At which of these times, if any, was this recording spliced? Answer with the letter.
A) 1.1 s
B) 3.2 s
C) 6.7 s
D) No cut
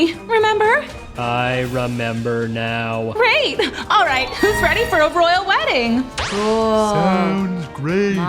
B